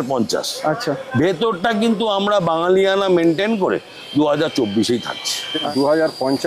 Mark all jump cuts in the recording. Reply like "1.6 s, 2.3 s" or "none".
5.5 s